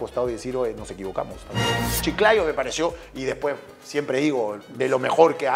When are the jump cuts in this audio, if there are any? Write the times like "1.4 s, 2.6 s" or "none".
1.9 s